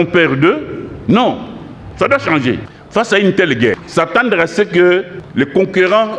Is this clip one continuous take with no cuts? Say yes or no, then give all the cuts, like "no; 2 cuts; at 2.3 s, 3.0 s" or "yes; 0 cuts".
no; 3 cuts; at 2.7 s, 3.8 s, 5.2 s